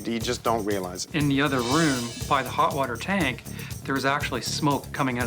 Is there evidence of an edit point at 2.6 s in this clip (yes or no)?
no